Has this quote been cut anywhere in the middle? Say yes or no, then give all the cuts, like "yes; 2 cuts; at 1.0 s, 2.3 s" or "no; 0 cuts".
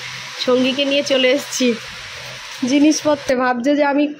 yes; 1 cut; at 3.2 s